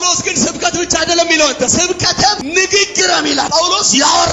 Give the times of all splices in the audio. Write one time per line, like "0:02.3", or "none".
0:02.1
0:03.5